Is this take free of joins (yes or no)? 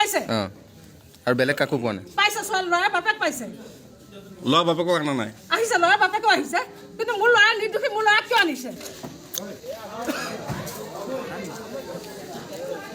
no